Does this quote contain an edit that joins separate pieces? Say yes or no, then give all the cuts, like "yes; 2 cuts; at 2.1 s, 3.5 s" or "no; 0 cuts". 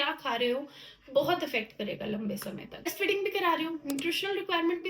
yes; 1 cut; at 2.9 s